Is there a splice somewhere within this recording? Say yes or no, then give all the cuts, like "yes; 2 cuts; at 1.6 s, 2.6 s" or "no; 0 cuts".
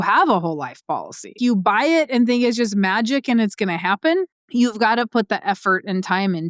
yes; 2 cuts; at 1.4 s, 4.4 s